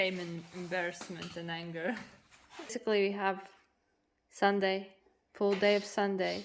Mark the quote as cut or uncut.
cut